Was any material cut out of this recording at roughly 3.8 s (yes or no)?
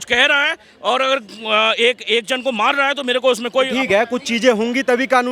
yes